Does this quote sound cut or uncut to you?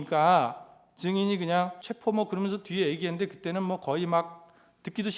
cut